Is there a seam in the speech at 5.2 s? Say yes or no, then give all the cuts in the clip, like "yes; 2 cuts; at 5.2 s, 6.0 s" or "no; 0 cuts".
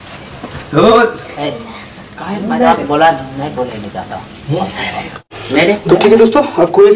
yes; 1 cut; at 5.2 s